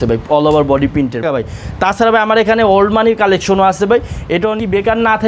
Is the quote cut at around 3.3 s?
no; 2 cuts; at 1.2 s, 4.5 s

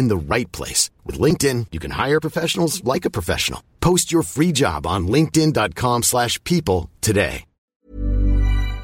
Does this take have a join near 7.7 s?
yes; 1 cut; at 7.7 s

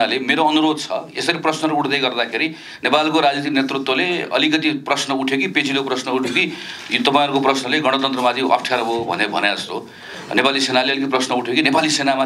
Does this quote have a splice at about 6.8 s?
no; 0 cuts

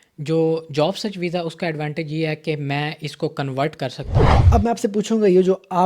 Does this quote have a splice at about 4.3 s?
yes; 1 cut; at 4.3 s

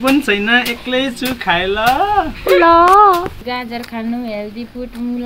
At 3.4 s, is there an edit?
yes; 1 cut; at 3.4 s

